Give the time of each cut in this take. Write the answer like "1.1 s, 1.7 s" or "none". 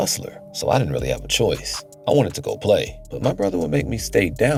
none